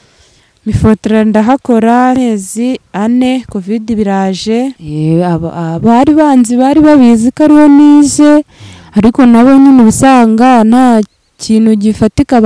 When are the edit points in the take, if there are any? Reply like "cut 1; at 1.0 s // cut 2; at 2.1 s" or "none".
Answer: cut 1; at 2.2 s // cut 2; at 4.8 s